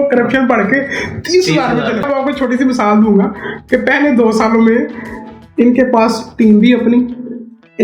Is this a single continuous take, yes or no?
no